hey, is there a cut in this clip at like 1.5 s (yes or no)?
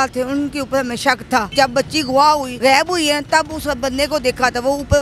yes